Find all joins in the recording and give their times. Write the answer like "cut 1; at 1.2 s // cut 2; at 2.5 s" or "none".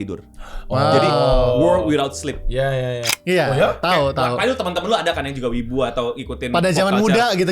cut 1; at 3.1 s